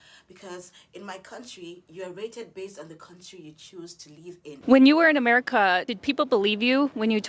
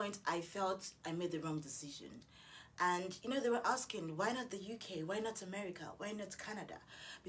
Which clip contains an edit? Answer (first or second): first